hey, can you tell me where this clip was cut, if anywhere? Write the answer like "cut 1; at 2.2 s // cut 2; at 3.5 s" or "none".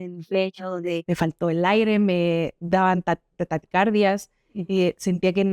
cut 1; at 1.0 s